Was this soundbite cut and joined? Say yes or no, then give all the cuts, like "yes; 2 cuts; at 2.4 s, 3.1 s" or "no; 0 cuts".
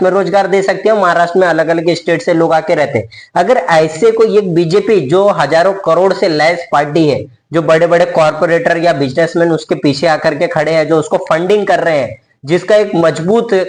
no; 0 cuts